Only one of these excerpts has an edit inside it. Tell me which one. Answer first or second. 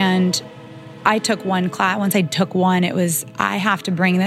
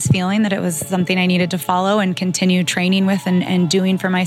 first